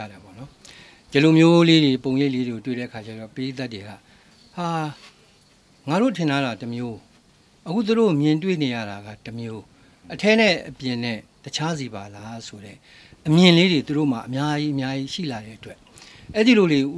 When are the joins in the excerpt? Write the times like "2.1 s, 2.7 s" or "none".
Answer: none